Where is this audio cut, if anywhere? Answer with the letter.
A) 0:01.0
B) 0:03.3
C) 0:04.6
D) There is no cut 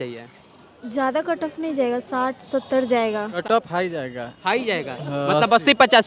B